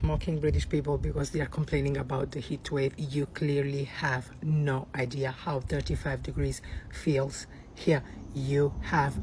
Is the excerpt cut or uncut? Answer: uncut